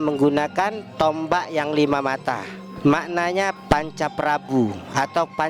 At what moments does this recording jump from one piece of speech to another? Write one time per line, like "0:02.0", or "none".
0:03.6